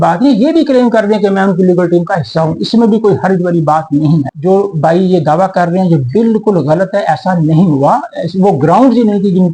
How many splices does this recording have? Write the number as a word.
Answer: one